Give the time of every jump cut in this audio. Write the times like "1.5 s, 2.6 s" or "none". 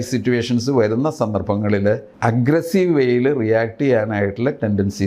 2.1 s